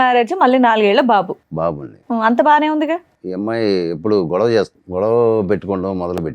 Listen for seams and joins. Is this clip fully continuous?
no; 2 cuts; at 3.2 s, 4.8 s

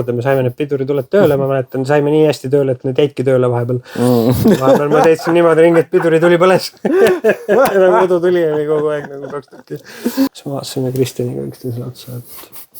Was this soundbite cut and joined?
yes; 1 cut; at 10.4 s

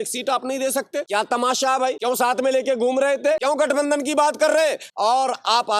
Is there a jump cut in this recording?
yes; 4 cuts; at 1.1 s, 2.0 s, 3.4 s, 4.8 s

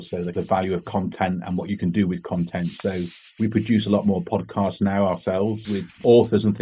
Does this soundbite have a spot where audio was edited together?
no; 0 cuts

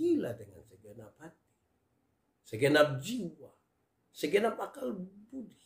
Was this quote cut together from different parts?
no; 0 cuts

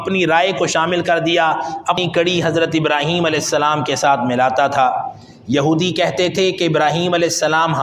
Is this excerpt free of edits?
no; 1 cut; at 2.0 s

